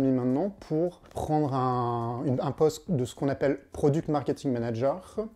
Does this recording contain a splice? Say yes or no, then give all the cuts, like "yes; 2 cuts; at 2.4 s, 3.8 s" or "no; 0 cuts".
yes; 1 cut; at 1.1 s